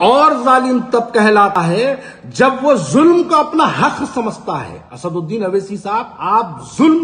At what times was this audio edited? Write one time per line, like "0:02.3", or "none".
0:01.5